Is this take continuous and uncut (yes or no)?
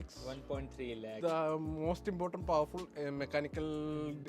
no